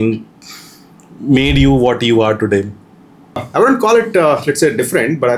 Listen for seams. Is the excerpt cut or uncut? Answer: cut